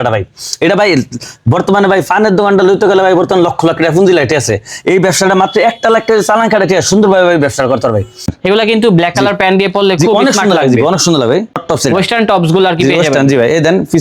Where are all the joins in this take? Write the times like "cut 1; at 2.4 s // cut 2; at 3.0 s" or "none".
cut 1; at 8.3 s // cut 2; at 11.5 s